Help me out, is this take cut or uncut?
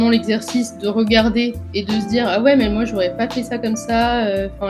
uncut